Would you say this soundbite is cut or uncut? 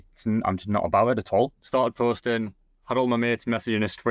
cut